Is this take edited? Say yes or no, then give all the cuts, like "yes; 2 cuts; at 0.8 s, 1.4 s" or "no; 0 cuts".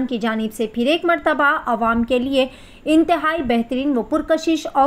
no; 0 cuts